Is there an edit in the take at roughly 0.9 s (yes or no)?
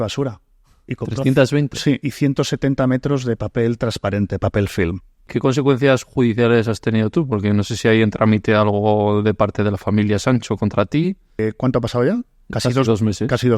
no